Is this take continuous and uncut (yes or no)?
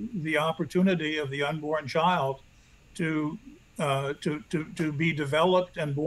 yes